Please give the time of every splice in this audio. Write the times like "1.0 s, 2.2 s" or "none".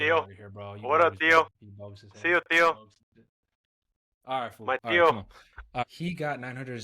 5.8 s